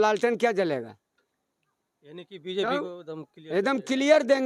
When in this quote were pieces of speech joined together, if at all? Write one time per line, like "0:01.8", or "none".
none